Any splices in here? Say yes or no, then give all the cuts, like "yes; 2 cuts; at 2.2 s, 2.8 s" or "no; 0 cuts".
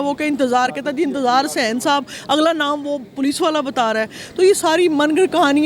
no; 0 cuts